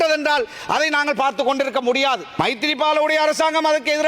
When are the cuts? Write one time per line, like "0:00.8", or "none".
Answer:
0:02.3